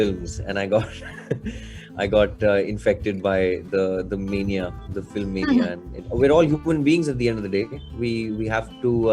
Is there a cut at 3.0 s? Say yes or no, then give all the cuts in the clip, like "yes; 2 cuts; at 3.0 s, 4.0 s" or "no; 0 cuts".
no; 1 cut; at 5.9 s